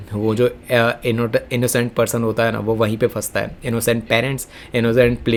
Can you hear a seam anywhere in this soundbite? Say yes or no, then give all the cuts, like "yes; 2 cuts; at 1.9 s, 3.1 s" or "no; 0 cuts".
no; 0 cuts